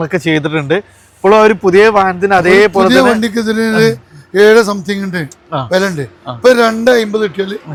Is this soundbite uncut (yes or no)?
yes